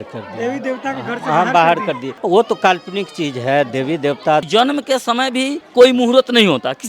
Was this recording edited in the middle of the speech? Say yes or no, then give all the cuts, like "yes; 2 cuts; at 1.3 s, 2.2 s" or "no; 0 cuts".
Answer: yes; 3 cuts; at 2.1 s, 4.5 s, 5.6 s